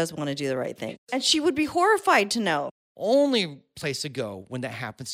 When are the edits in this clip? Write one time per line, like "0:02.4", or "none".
0:00.9
0:02.6

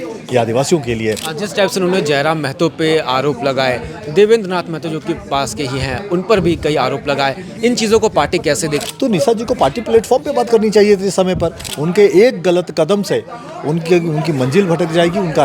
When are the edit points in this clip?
0:01.3
0:08.8
0:11.7

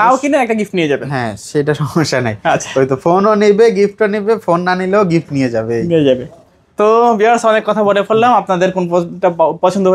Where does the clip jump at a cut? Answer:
none

